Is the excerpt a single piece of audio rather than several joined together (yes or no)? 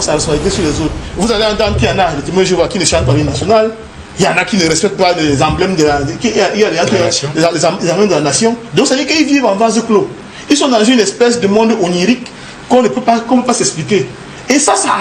no